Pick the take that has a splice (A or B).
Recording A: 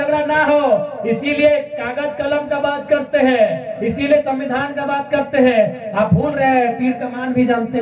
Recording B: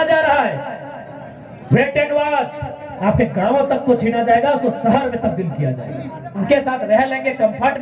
B